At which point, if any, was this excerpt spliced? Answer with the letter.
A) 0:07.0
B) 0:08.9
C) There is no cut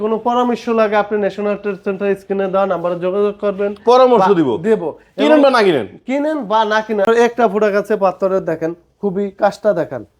A